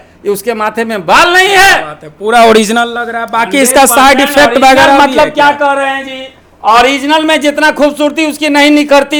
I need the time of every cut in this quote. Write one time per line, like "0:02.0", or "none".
none